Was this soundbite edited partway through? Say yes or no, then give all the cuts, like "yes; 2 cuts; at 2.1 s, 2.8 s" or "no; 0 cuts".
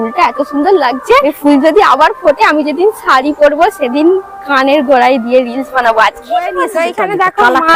no; 0 cuts